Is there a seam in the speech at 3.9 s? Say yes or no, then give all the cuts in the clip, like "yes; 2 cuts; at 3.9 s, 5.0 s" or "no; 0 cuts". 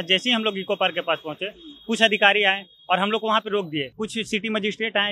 yes; 1 cut; at 3.9 s